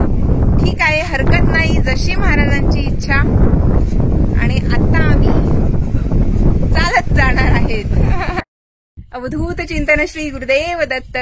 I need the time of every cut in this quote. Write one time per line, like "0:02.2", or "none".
0:08.4

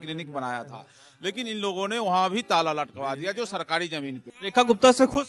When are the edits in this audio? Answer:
0:04.2

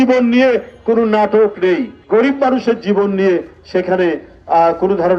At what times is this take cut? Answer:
0:01.9

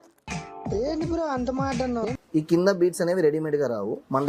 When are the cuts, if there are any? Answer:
0:02.2

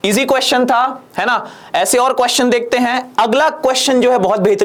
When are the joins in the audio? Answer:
none

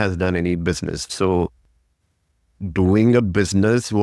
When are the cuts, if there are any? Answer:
0:01.1

